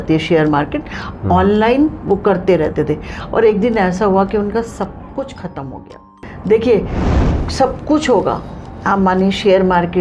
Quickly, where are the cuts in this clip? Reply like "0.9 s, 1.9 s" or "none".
6.3 s